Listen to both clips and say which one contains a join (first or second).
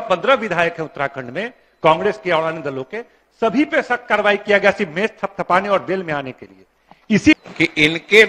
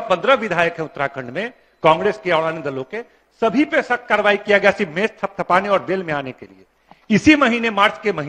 first